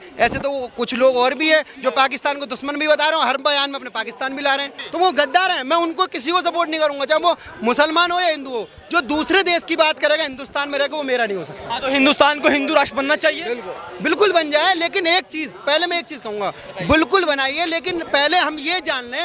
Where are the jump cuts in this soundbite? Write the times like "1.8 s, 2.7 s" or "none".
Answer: 4.8 s